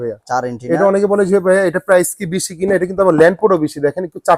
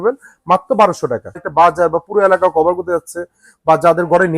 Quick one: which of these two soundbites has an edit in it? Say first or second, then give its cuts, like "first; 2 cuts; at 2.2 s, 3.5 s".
second; 1 cut; at 1.5 s